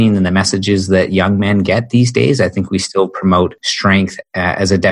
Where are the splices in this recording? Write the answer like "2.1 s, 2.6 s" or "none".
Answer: 3.7 s